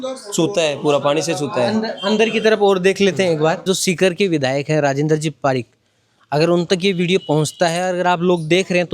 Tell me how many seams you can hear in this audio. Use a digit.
1